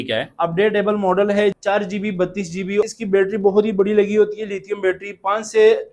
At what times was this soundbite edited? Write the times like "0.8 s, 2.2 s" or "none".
1.6 s, 2.8 s